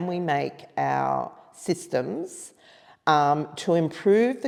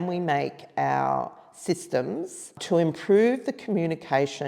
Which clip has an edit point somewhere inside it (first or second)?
second